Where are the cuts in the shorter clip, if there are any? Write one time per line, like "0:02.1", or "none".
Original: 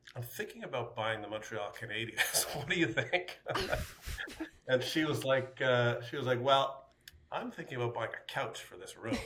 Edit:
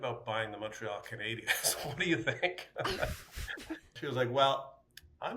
0:03.9